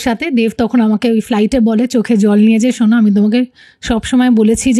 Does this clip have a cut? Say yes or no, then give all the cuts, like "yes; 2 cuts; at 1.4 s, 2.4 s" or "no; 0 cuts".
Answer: no; 0 cuts